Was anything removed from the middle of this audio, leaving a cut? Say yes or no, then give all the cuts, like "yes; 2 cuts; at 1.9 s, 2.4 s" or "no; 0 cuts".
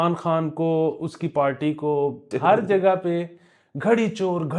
yes; 1 cut; at 2.3 s